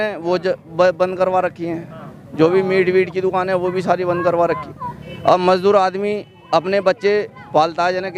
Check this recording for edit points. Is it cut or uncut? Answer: uncut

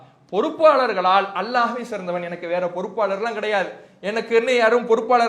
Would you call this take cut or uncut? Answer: uncut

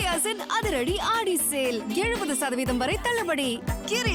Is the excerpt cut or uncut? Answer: uncut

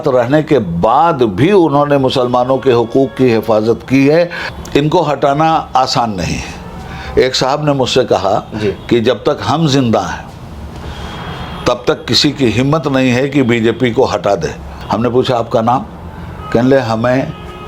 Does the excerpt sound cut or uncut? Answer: cut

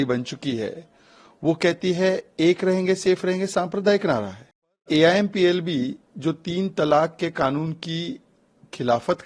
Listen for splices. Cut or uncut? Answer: cut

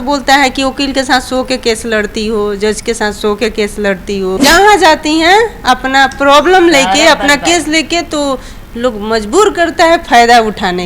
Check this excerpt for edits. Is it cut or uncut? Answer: cut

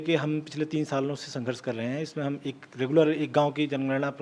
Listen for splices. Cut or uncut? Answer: uncut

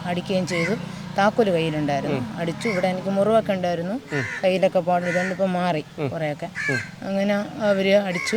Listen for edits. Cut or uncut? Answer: uncut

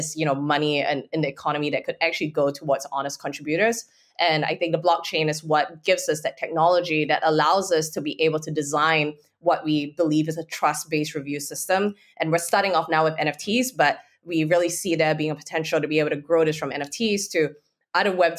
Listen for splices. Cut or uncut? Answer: uncut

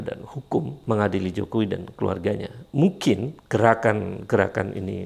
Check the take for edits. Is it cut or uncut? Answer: cut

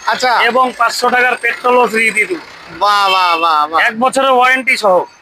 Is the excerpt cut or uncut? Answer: uncut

